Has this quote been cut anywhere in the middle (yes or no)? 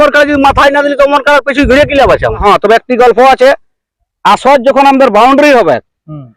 yes